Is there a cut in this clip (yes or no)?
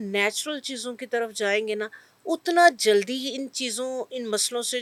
no